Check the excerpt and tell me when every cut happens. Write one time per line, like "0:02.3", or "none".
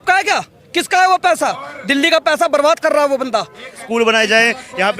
0:03.8